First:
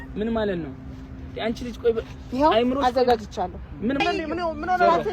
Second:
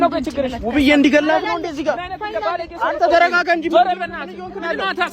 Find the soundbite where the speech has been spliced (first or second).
first